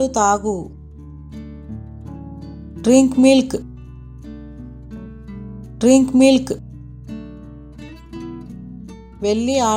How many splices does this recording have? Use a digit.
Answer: 0